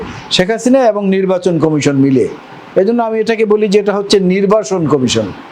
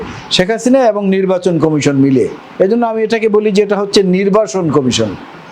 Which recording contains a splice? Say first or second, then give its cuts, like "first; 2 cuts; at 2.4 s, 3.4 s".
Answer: second; 1 cut; at 2.4 s